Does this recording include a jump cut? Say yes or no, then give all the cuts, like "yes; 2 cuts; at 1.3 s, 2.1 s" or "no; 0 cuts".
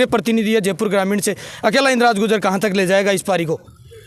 no; 0 cuts